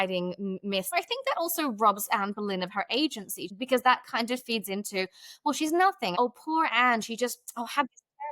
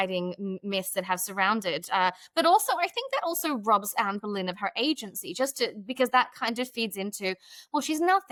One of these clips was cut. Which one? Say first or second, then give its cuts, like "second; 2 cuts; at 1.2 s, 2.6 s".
first; 3 cuts; at 0.9 s, 3.5 s, 6.1 s